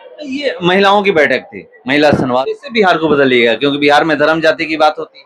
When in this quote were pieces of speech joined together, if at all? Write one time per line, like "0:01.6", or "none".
0:02.4